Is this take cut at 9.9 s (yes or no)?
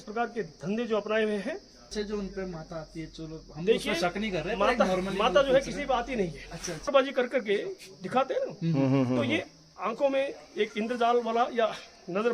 no